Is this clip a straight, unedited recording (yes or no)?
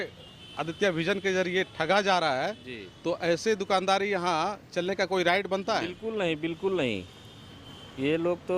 yes